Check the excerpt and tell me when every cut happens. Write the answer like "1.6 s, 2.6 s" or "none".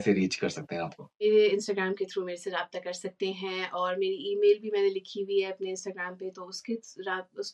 1.2 s